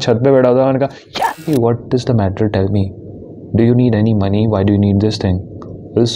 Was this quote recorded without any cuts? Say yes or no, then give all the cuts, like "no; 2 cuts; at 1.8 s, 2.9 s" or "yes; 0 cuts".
no; 1 cut; at 1.4 s